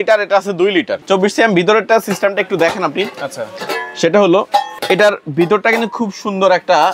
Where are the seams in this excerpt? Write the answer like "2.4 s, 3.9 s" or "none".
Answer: 1.0 s, 4.7 s